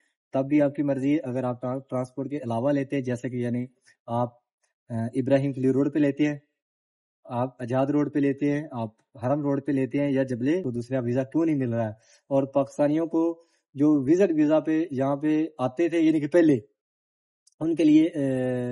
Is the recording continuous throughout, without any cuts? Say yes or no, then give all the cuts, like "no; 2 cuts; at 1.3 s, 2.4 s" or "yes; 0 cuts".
no; 1 cut; at 10.7 s